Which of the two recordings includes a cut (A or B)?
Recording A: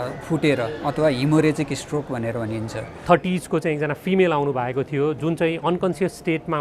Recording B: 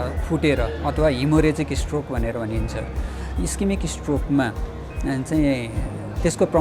A